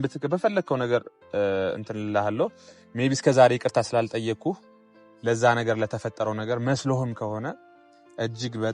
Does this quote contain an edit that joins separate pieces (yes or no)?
no